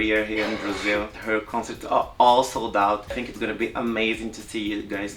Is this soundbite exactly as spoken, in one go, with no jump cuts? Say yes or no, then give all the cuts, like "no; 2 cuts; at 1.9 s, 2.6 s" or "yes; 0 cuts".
no; 2 cuts; at 1.2 s, 3.2 s